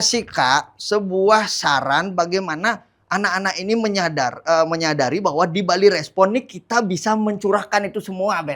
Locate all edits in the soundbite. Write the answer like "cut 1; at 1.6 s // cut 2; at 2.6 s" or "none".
none